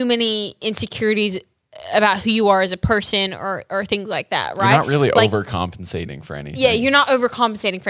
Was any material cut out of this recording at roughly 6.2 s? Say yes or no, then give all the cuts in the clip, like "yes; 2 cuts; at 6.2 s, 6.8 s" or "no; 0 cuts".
no; 0 cuts